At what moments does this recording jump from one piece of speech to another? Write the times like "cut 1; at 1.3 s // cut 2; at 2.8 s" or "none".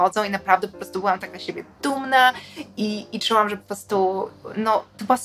none